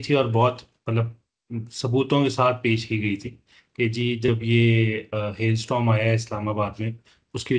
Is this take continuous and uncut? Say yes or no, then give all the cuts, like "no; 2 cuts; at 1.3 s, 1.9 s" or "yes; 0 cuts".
yes; 0 cuts